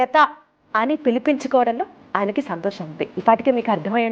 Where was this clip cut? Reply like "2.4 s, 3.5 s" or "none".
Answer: 3.1 s

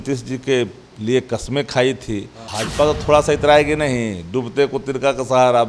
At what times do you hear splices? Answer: 2.4 s

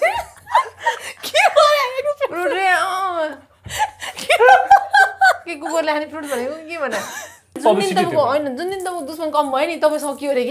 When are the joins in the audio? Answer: 7.6 s

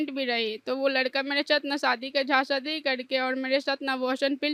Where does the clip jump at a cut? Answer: none

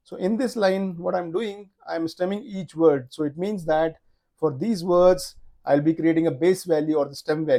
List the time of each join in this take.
none

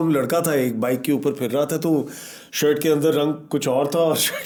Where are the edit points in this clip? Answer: none

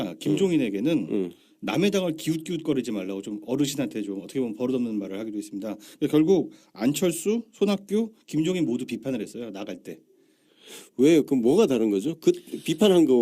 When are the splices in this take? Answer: 3.5 s

